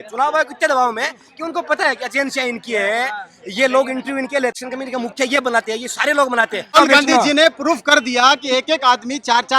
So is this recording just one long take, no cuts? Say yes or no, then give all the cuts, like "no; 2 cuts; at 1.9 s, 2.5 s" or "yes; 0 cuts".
no; 2 cuts; at 4.6 s, 6.7 s